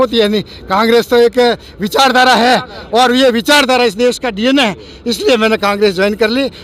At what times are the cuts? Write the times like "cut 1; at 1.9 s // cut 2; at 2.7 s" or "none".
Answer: none